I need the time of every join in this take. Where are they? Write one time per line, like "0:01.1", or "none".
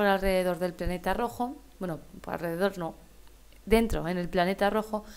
0:03.7